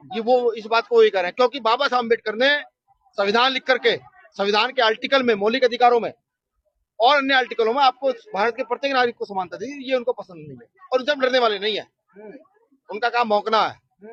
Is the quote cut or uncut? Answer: uncut